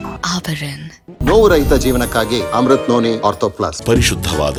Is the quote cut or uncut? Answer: uncut